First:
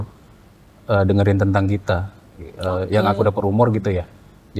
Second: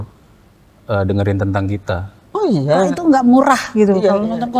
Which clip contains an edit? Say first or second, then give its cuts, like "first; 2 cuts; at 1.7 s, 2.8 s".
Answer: second; 1 cut; at 2.2 s